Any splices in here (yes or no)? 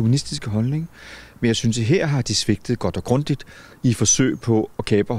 no